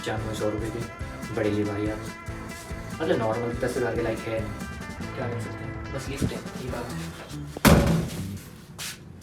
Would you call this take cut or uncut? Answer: uncut